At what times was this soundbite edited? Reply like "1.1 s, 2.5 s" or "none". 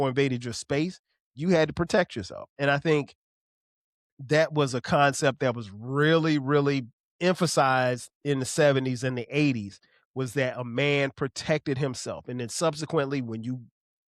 7.0 s